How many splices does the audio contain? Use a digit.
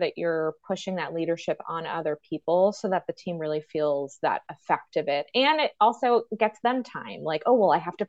0